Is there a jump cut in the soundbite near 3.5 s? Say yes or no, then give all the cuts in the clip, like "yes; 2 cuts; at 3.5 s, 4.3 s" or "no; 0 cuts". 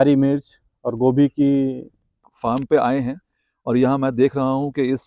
no; 1 cut; at 2.3 s